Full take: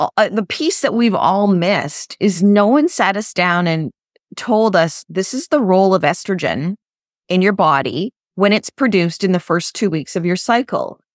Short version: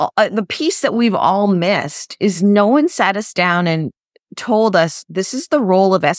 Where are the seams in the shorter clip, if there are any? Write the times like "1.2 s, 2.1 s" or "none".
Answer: none